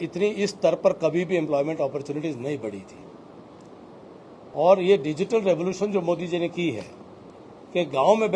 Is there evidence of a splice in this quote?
no; 0 cuts

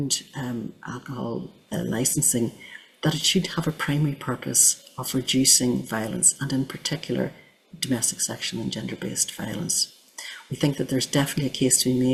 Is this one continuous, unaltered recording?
yes; 0 cuts

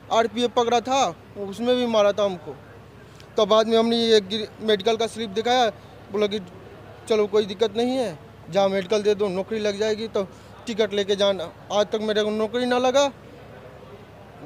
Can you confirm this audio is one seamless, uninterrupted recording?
yes; 0 cuts

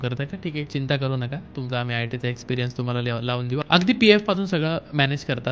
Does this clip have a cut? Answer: yes; 1 cut; at 3.6 s

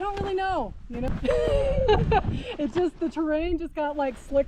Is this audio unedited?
no; 1 cut; at 1.1 s

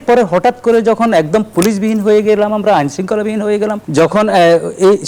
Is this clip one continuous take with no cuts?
no; 1 cut; at 3.8 s

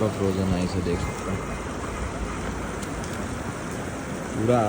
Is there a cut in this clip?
no; 0 cuts

